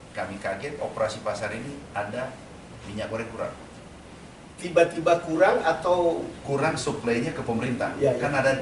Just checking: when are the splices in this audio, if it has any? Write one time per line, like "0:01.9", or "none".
none